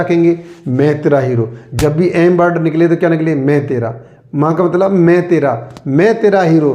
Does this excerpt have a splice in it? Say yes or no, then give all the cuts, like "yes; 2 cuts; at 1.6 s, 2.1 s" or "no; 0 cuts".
no; 0 cuts